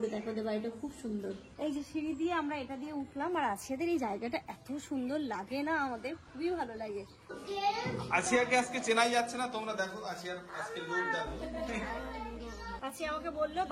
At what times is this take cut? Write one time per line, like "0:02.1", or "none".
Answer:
0:01.5
0:07.4
0:12.8